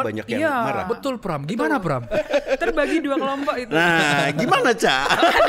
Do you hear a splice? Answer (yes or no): yes